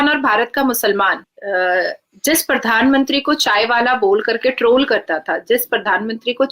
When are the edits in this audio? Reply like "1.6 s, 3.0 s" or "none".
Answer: 1.3 s